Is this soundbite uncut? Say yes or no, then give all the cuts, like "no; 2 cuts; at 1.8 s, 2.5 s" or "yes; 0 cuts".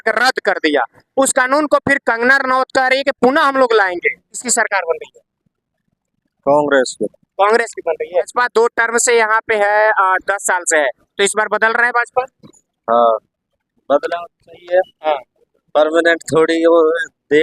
no; 2 cuts; at 4.4 s, 8.3 s